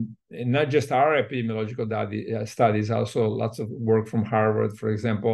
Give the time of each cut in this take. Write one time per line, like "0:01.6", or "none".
none